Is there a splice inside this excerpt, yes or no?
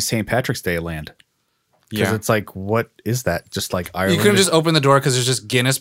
yes